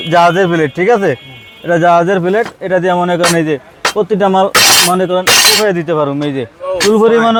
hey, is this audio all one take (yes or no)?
yes